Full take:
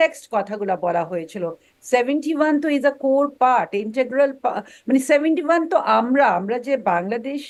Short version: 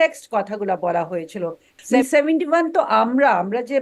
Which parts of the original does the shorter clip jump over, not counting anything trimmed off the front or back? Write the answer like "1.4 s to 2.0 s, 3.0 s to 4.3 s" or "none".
2.0 s to 4.9 s